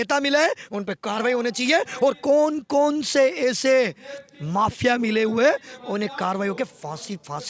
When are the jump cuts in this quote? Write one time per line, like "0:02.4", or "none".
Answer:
none